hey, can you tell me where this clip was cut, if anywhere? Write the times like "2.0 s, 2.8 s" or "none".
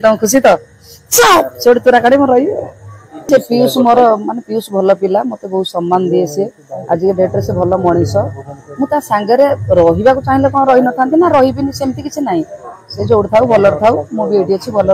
3.2 s